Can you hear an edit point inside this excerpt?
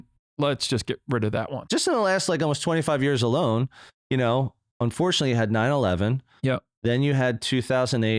yes; 1 cut; at 1.7 s

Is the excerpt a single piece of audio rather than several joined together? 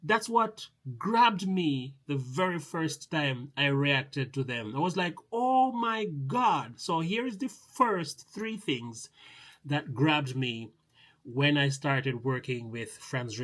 yes; 0 cuts

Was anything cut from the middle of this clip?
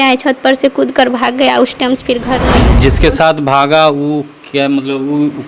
yes; 1 cut; at 2.7 s

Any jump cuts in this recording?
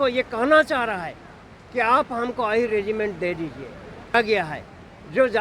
yes; 1 cut; at 4.1 s

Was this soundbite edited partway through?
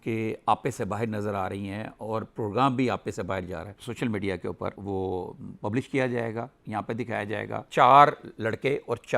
yes; 2 cuts; at 3.7 s, 7.7 s

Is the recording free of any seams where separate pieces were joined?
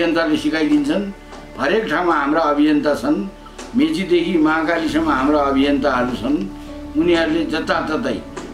yes; 0 cuts

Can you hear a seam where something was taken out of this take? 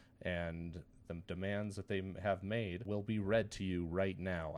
yes; 1 cut; at 2.8 s

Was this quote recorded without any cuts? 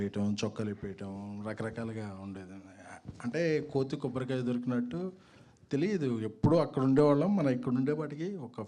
yes; 0 cuts

